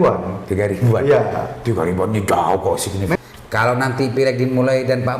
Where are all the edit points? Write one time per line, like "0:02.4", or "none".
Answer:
0:03.2